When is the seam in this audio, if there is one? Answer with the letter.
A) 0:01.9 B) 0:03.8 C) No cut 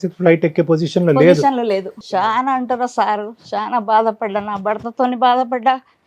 A